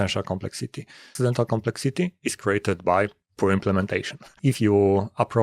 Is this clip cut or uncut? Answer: cut